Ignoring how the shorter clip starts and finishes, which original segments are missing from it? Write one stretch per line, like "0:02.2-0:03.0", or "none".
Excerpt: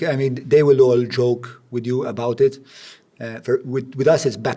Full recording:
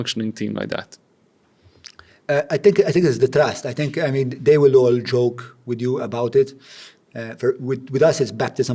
none